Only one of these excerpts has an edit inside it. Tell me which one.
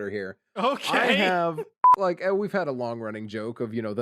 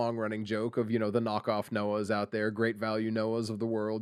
first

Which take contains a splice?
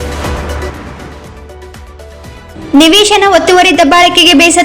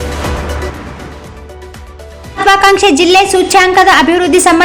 first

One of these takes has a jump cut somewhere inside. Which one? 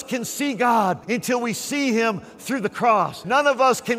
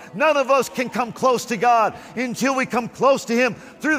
first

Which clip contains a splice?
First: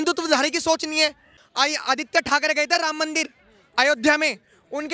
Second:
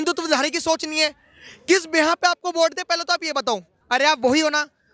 first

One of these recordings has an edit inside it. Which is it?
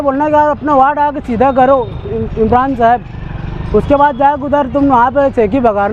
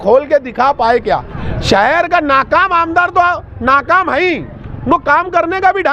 second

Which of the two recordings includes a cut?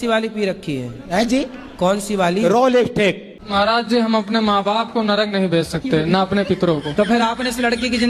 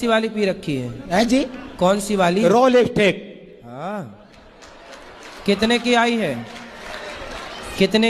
first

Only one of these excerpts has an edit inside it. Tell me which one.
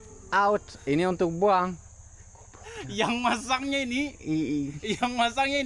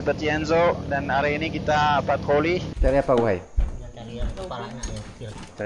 second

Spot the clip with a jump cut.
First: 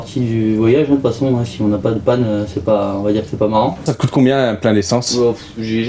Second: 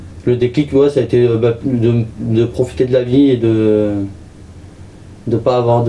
first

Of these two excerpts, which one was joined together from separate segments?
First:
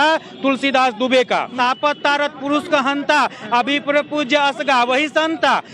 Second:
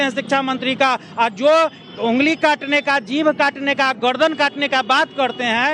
first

